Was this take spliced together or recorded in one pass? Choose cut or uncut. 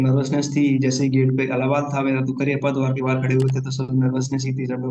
uncut